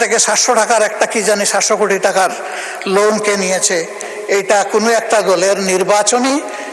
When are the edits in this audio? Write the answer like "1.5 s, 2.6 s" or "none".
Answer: none